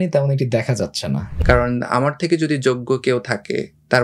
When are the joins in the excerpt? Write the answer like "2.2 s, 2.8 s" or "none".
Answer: 1.3 s